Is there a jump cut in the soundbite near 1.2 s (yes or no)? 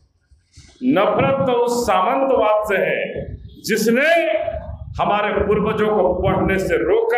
no